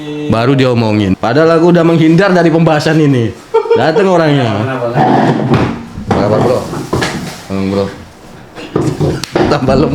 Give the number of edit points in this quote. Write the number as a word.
one